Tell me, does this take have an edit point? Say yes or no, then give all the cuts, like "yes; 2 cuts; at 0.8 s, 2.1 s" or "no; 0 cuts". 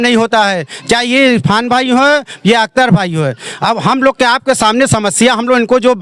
no; 0 cuts